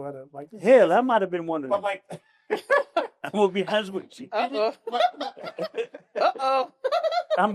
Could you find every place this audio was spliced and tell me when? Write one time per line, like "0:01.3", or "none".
none